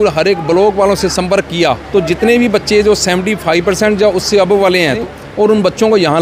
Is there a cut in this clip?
yes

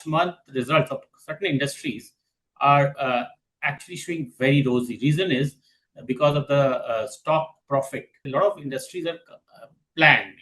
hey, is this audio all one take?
no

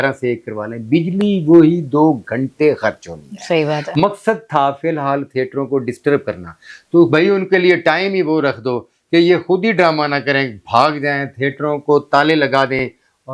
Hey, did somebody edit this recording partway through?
no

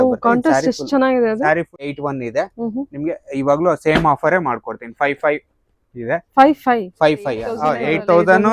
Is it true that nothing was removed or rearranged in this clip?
no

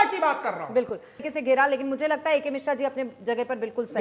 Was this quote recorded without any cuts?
no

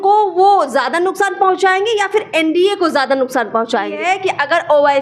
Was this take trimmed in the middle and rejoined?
yes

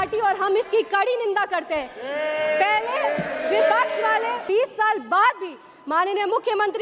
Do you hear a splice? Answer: yes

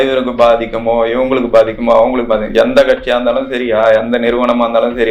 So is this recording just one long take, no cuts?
yes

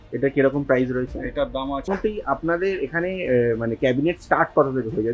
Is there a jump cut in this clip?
yes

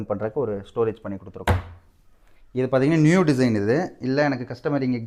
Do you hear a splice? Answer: no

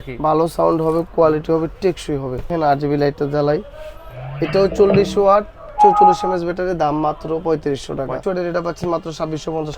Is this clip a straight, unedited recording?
no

